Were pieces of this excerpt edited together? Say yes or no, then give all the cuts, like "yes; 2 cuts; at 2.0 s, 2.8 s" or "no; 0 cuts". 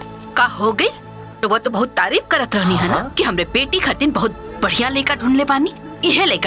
yes; 1 cut; at 1.4 s